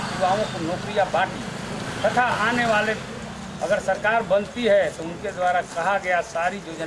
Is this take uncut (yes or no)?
yes